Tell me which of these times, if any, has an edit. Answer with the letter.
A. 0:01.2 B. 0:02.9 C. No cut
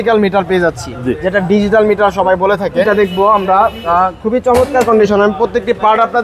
B